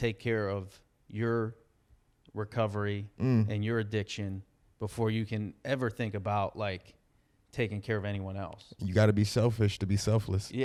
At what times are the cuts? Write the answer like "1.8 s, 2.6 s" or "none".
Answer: none